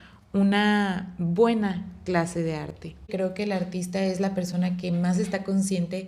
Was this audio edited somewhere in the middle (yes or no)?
yes